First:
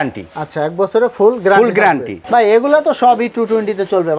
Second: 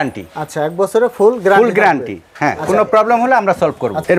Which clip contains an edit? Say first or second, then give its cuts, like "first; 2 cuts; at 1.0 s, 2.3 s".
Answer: first; 1 cut; at 2.1 s